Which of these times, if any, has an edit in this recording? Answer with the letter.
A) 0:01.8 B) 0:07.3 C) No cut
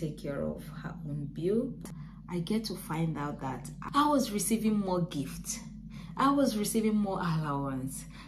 A